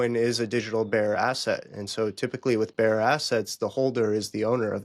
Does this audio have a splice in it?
no; 0 cuts

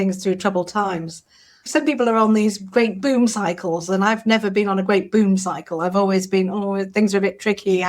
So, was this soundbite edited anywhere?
yes; 1 cut; at 1.7 s

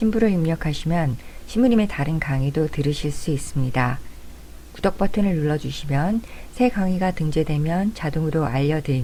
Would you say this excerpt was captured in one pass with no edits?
yes; 0 cuts

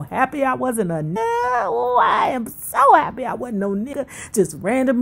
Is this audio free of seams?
no; 2 cuts; at 1.2 s, 3.9 s

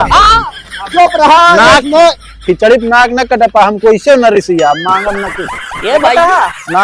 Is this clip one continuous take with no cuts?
yes; 0 cuts

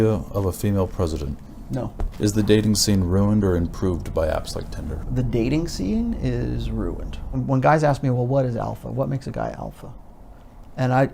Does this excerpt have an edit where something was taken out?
yes; 3 cuts; at 2.0 s, 5.1 s, 7.4 s

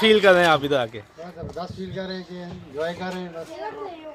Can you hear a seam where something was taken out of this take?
no; 0 cuts

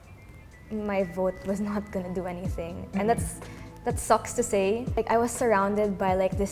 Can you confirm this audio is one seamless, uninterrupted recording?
no; 1 cut; at 4.9 s

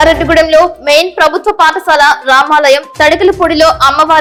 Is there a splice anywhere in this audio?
no; 0 cuts

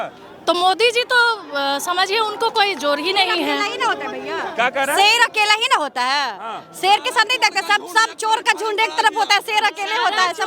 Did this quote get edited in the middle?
no; 0 cuts

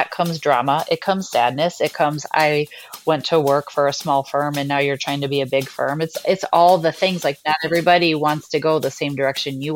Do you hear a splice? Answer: no; 0 cuts

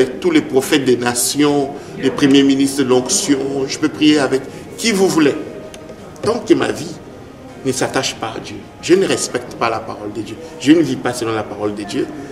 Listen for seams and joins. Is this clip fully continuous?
yes; 0 cuts

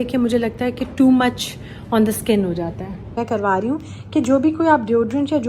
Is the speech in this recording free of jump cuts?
no; 1 cut; at 3.2 s

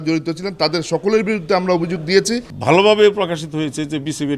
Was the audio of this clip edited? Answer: yes; 1 cut; at 2.5 s

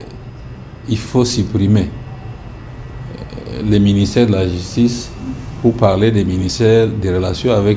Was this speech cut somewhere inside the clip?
no; 0 cuts

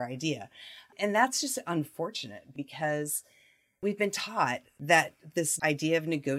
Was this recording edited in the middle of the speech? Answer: yes; 5 cuts; at 0.9 s, 2.5 s, 3.8 s, 4.7 s, 5.5 s

